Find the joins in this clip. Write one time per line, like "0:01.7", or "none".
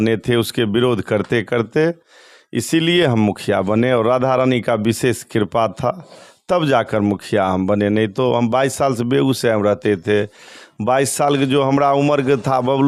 none